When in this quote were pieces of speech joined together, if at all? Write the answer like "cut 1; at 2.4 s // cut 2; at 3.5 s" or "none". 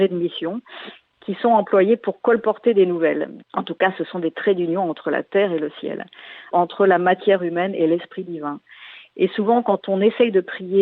cut 1; at 3.3 s // cut 2; at 6.5 s